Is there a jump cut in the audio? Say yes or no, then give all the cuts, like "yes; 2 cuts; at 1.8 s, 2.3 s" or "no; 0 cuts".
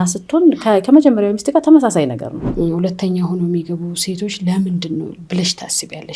yes; 1 cut; at 2.4 s